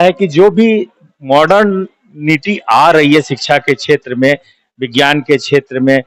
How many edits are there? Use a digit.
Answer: 0